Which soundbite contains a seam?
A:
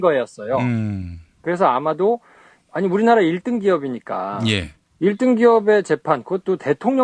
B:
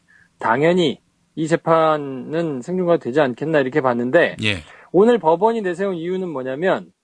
B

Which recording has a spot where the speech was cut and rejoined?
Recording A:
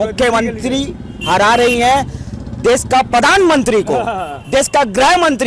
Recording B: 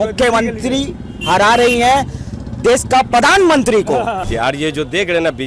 B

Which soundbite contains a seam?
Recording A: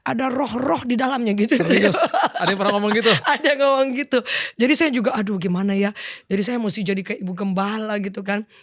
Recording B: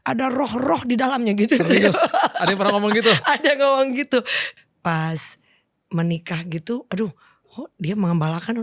B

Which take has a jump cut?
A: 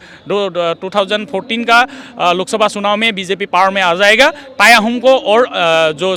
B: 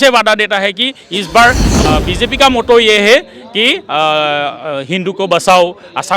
B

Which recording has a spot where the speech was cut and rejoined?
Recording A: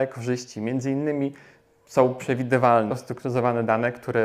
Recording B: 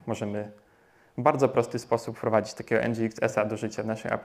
A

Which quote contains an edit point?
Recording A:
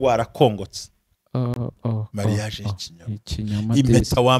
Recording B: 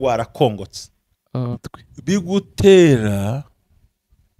B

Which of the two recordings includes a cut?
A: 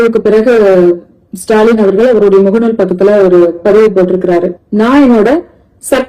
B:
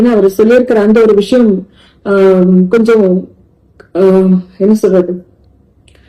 A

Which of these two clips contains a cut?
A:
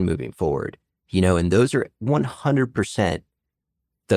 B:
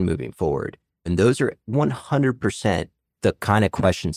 B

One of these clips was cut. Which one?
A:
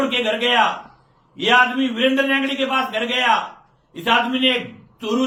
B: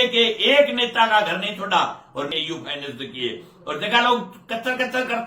B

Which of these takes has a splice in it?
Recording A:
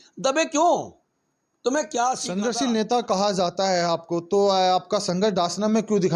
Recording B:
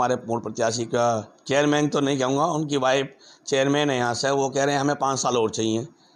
A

